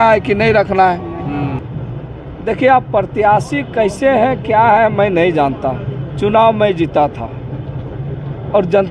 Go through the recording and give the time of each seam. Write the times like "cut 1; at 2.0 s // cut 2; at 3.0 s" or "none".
cut 1; at 1.6 s